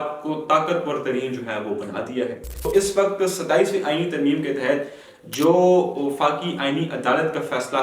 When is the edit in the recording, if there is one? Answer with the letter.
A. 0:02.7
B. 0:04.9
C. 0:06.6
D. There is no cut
A